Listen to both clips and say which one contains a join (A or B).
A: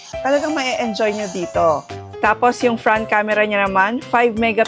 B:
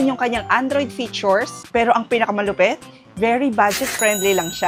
A